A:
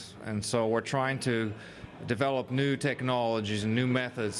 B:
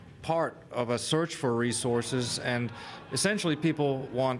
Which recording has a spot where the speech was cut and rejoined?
A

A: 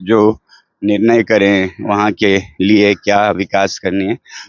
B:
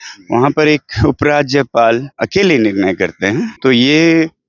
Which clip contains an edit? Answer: B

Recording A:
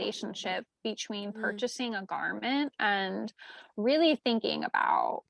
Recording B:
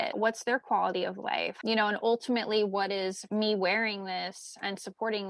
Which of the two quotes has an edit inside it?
B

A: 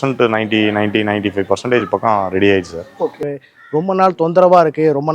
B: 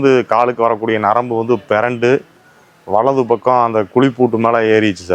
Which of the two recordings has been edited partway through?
A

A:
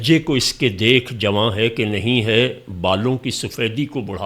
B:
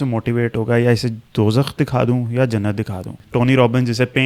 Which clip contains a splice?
B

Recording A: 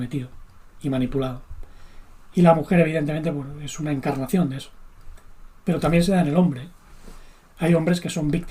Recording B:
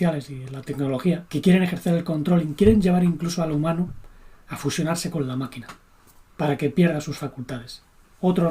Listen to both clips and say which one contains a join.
B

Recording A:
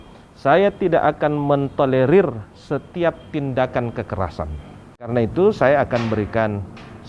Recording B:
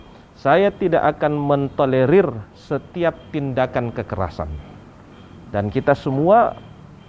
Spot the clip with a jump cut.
A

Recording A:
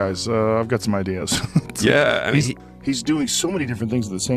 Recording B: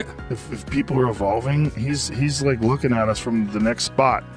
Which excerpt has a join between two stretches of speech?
A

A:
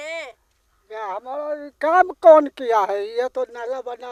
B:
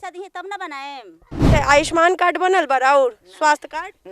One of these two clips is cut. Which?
B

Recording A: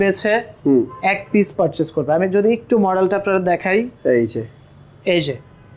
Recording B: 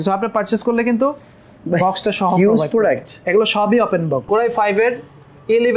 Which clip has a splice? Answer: B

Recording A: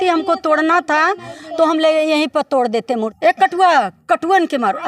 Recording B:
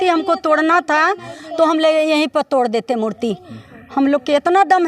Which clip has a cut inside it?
A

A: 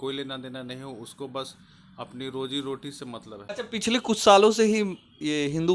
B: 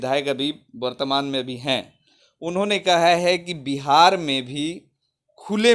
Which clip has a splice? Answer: A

